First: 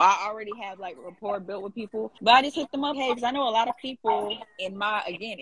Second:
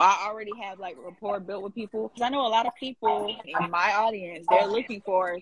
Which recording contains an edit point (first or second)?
second